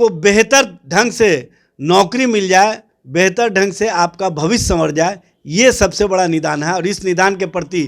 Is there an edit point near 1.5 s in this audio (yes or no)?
no